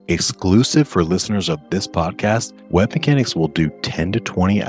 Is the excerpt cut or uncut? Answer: cut